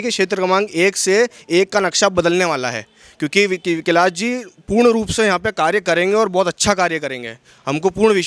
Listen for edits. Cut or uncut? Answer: uncut